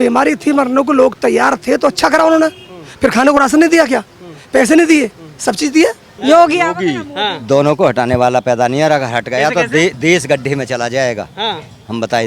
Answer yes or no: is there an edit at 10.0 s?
no